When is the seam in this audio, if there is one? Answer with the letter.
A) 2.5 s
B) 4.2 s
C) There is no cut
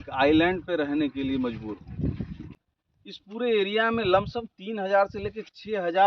A